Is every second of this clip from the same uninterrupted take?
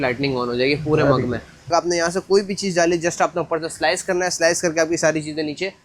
no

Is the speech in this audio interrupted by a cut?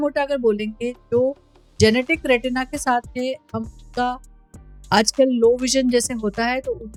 no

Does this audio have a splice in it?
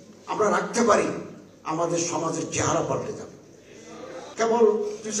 yes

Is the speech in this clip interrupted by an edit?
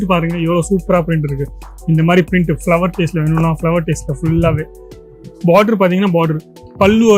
no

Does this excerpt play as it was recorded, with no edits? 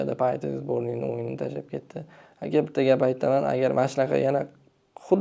yes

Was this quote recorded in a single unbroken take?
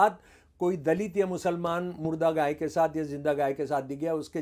yes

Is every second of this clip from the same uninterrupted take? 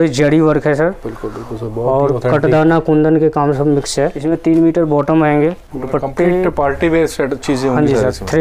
no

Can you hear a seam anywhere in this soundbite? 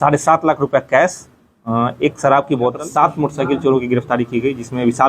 yes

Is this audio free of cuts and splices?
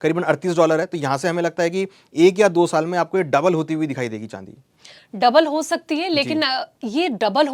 yes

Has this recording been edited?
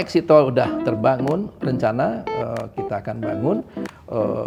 no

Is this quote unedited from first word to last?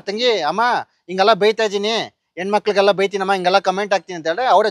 yes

